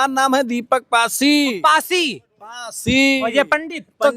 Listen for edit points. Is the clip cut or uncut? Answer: uncut